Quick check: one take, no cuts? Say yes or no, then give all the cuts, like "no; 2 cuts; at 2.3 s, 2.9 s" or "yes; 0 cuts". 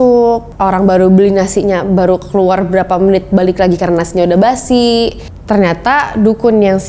yes; 0 cuts